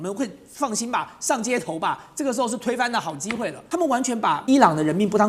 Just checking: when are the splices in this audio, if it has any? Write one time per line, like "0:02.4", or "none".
0:03.6
0:04.4